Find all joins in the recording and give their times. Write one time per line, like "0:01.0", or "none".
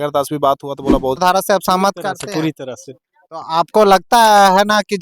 0:01.2